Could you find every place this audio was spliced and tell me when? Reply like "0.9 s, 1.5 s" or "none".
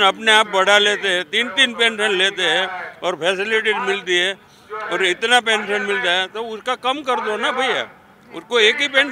none